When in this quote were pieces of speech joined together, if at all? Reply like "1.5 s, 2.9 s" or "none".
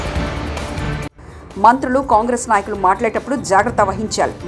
1.1 s